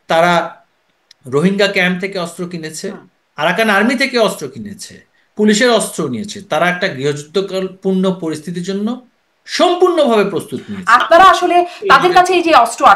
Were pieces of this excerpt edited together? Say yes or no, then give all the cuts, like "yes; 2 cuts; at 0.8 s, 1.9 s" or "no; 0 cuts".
yes; 1 cut; at 11.0 s